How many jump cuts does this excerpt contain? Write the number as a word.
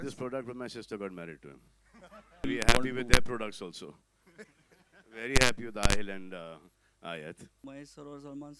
two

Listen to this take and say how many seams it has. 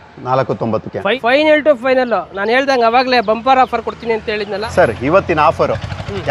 two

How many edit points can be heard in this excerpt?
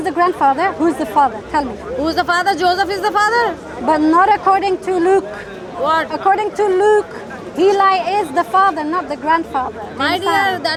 zero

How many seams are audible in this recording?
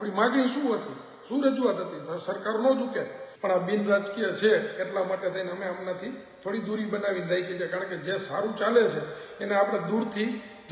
one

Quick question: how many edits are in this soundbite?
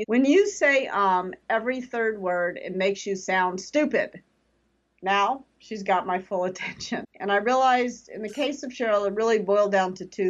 one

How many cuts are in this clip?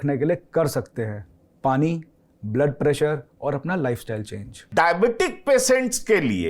one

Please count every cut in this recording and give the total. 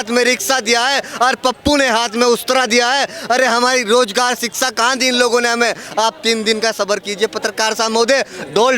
one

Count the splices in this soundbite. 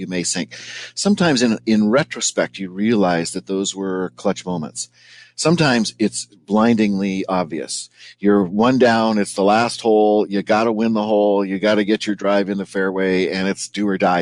zero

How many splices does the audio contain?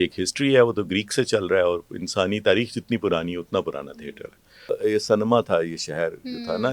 one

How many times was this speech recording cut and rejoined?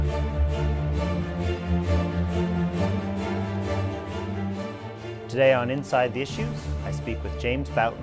zero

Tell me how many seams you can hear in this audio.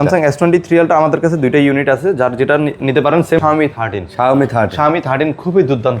one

